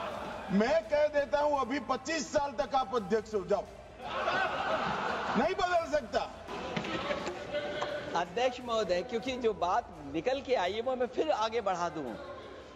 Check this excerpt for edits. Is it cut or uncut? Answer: cut